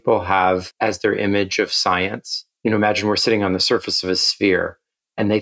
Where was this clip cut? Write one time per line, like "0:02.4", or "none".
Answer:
none